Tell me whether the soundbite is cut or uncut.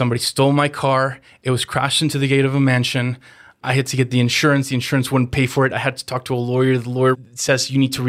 cut